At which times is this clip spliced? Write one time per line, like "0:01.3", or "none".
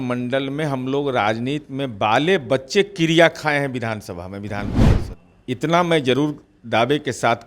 0:04.8